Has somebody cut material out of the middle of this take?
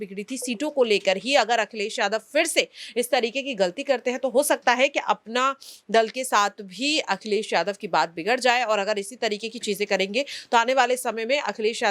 no; 0 cuts

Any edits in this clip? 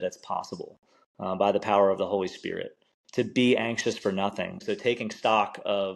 yes; 1 cut; at 4.6 s

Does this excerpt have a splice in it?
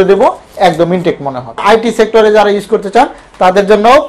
yes; 1 cut; at 1.6 s

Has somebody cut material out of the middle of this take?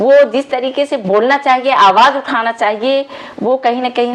no; 0 cuts

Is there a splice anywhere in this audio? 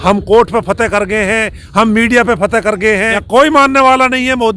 yes; 1 cut; at 3.0 s

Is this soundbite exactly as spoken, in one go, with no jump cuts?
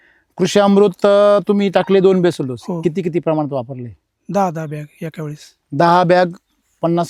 yes; 0 cuts

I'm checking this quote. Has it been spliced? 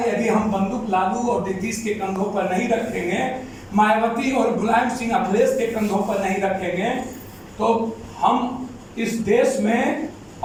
no; 0 cuts

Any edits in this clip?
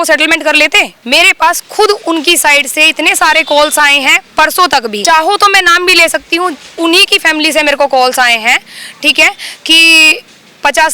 yes; 2 cuts; at 0.9 s, 5.0 s

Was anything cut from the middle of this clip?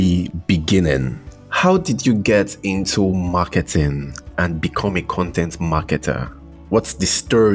no; 0 cuts

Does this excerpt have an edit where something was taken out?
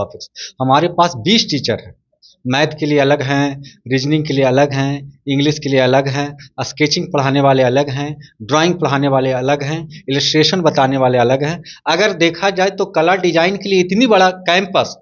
no; 0 cuts

